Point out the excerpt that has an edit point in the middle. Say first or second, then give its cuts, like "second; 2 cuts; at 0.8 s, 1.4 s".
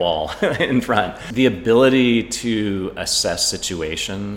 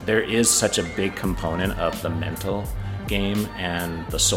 first; 1 cut; at 1.2 s